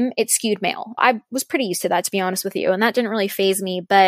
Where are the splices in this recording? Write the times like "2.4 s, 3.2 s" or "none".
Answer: 1.0 s